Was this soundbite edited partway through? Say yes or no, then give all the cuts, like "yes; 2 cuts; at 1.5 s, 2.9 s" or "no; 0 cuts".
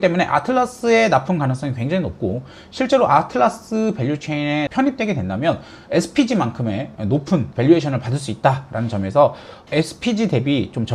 no; 0 cuts